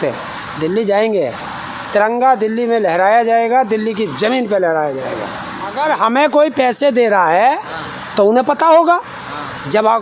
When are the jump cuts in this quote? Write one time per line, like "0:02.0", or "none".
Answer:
0:05.7